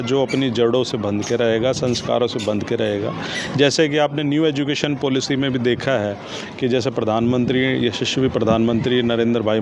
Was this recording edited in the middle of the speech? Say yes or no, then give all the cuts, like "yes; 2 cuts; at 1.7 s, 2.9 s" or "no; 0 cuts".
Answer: no; 0 cuts